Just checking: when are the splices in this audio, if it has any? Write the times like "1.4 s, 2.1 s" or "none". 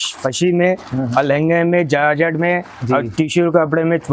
none

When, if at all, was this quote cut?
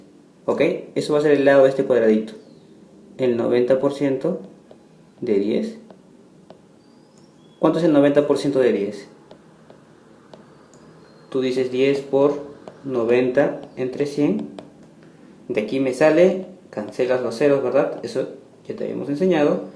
7.8 s

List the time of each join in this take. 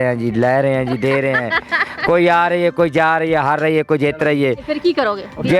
none

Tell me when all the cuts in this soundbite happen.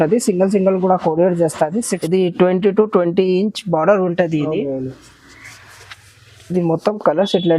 2.0 s

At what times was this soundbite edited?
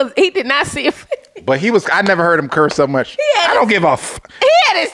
none

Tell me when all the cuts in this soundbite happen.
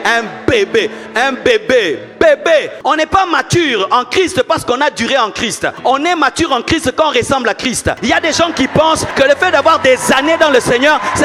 2.7 s, 5.7 s, 8.0 s, 9.1 s

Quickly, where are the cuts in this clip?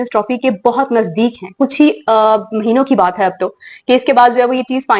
none

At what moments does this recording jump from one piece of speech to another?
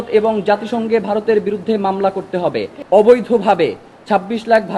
2.7 s

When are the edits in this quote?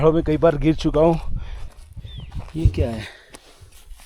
1.6 s

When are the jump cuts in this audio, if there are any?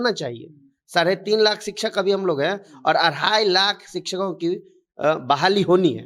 none

